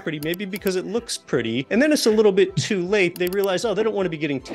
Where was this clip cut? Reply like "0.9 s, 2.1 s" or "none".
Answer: 1.7 s, 3.2 s